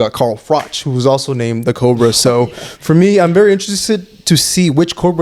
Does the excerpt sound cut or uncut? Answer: uncut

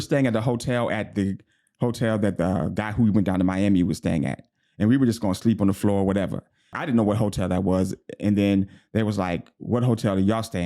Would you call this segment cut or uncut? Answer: cut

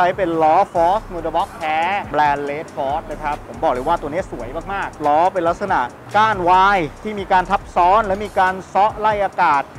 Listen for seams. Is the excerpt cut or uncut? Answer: cut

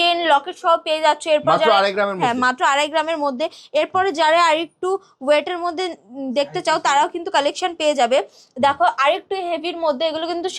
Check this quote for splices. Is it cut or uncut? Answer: uncut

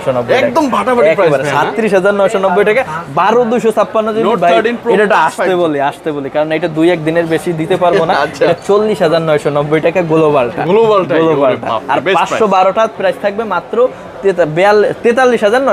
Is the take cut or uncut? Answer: uncut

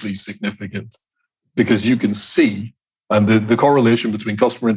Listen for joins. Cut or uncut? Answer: uncut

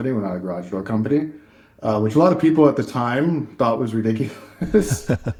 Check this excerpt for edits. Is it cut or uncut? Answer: uncut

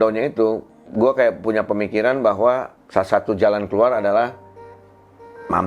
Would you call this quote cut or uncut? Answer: cut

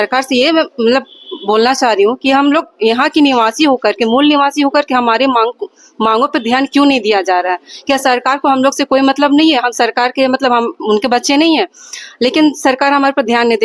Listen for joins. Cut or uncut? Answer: uncut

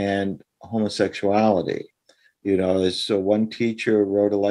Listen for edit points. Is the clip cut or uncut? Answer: uncut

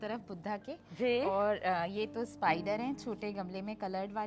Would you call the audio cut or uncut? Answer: uncut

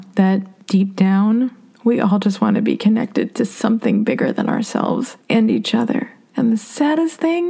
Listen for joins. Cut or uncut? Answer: cut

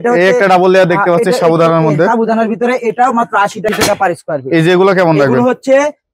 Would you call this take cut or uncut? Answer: cut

